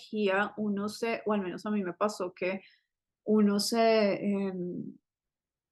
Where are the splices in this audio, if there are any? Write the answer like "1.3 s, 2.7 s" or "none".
none